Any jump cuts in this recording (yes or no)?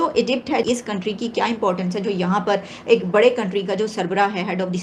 no